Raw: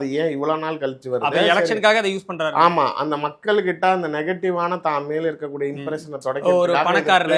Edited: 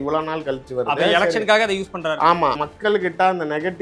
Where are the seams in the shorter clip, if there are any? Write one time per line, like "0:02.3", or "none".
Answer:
0:02.6